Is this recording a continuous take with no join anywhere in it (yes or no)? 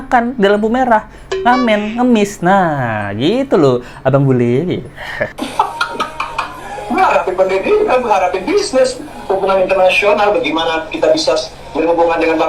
yes